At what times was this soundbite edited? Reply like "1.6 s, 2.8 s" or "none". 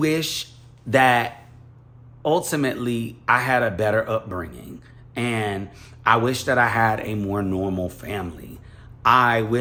none